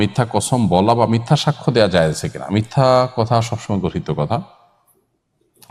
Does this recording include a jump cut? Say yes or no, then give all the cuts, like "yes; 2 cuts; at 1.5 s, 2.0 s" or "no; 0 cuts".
no; 0 cuts